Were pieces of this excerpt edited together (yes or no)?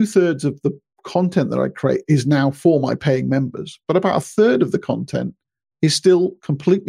no